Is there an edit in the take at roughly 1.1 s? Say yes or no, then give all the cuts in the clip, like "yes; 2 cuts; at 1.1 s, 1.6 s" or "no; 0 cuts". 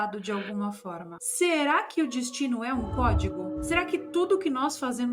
yes; 1 cut; at 1.1 s